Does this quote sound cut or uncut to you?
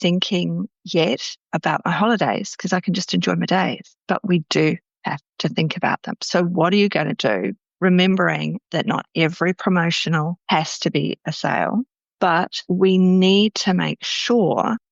uncut